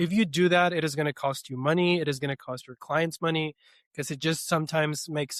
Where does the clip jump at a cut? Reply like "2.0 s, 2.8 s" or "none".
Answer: none

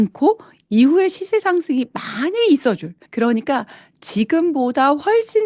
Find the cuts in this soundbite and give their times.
3.0 s

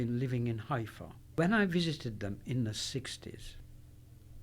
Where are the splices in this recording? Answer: 1.2 s

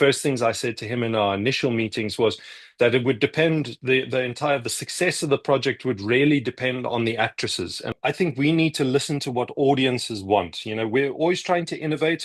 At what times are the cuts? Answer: 7.9 s

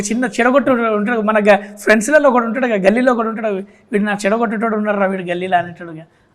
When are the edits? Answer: none

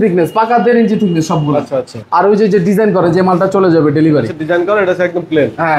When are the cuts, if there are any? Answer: 1.9 s

